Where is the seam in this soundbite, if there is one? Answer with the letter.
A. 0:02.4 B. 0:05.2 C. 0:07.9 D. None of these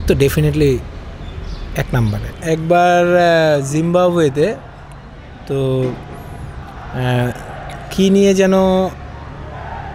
A